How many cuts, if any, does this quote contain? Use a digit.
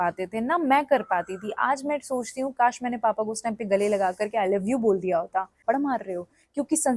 1